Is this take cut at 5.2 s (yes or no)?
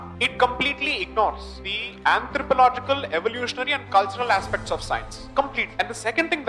yes